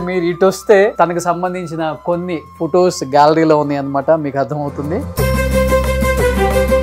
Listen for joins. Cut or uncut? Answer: cut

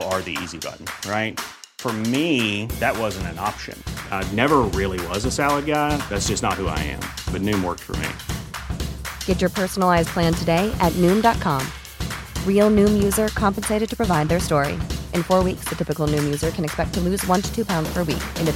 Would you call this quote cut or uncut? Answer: uncut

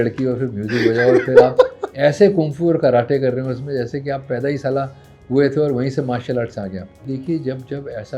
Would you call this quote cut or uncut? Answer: cut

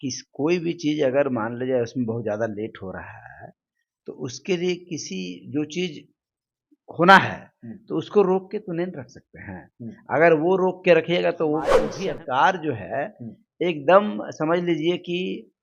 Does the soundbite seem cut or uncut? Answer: cut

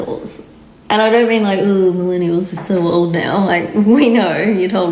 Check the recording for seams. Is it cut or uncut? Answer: uncut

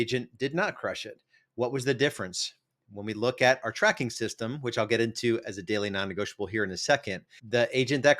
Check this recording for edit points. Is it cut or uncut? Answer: uncut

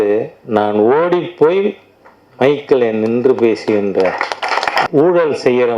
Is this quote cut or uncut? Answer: cut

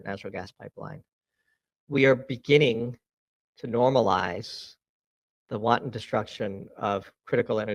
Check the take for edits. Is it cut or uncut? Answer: uncut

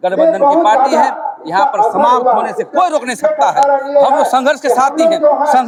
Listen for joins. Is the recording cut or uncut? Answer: uncut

